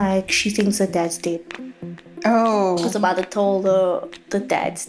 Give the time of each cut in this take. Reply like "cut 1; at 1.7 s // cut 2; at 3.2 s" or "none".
none